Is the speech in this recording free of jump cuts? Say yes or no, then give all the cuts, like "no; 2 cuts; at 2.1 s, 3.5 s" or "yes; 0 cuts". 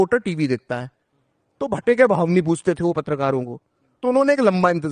yes; 0 cuts